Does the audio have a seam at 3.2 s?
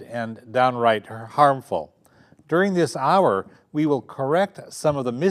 yes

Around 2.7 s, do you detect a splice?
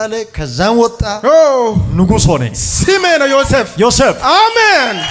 no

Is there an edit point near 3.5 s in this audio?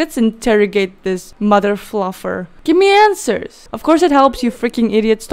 yes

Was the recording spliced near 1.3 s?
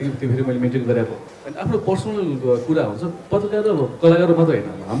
yes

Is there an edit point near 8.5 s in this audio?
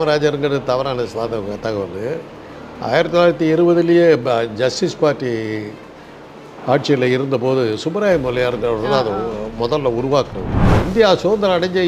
no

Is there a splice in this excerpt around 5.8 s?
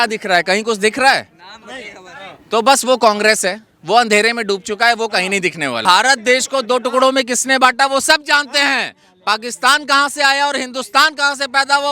yes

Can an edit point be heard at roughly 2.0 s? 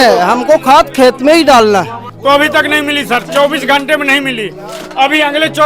yes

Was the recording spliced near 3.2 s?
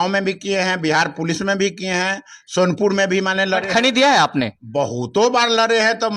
no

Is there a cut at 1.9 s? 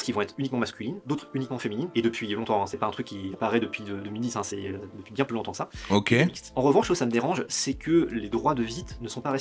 no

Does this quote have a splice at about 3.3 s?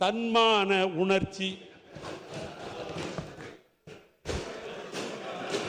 no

